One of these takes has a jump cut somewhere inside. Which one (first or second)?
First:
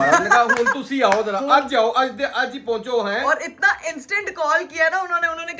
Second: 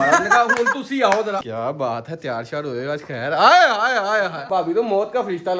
second